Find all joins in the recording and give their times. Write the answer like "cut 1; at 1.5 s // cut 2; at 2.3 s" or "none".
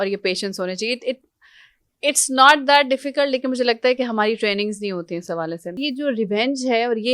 cut 1; at 5.8 s